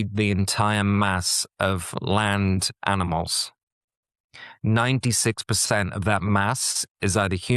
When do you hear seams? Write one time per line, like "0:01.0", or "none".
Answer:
none

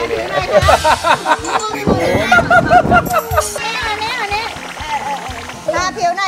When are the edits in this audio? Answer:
0:03.6

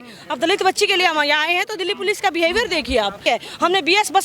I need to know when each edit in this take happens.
0:03.2

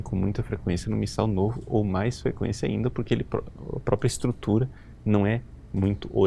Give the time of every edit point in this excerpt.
none

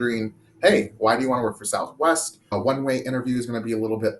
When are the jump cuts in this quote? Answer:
0:02.5

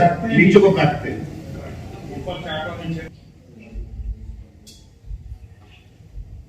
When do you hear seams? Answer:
0:03.1

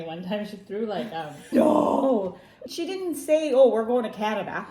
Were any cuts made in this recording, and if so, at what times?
0:01.5
0:02.6

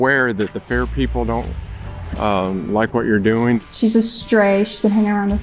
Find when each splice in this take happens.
0:03.6

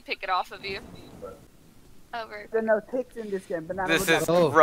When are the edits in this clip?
0:01.4

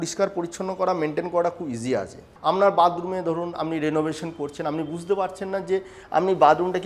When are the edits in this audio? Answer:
0:02.2

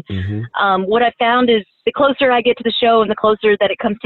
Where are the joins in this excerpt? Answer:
0:01.8

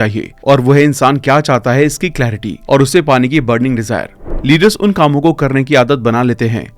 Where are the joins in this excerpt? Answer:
0:04.2

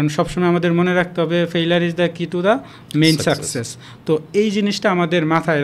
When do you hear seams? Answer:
none

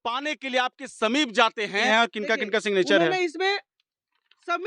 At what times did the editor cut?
0:01.9

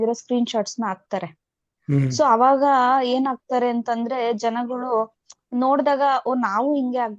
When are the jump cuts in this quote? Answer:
none

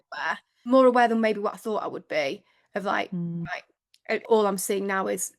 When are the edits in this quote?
0:00.7
0:04.1

